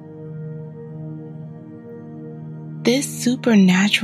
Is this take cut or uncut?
cut